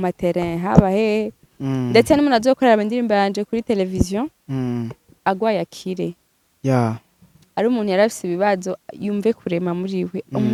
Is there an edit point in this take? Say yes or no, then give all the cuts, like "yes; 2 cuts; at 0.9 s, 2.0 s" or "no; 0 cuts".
no; 0 cuts